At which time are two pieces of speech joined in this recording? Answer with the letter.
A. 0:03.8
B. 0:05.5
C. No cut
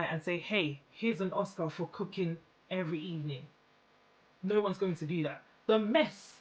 B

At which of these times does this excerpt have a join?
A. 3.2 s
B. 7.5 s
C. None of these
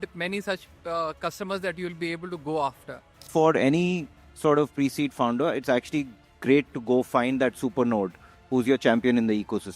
A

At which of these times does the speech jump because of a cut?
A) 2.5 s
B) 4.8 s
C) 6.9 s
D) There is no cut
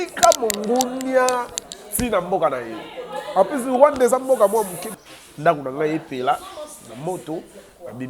B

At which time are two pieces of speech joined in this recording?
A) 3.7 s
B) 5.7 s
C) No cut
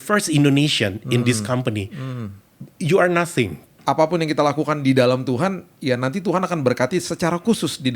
A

